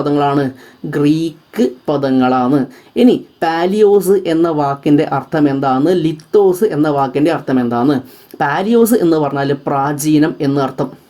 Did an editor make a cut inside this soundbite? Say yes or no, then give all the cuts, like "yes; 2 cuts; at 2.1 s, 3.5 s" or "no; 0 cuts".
no; 0 cuts